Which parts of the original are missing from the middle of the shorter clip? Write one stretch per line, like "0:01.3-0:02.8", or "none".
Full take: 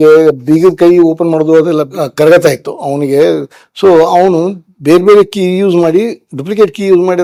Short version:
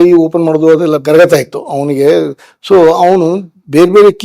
0:01.9-0:02.1